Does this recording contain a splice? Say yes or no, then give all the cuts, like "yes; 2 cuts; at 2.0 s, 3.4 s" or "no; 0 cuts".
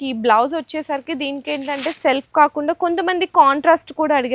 no; 0 cuts